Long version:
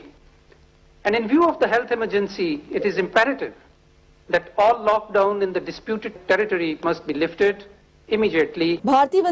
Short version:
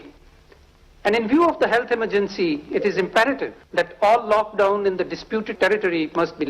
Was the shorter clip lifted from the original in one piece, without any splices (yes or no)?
no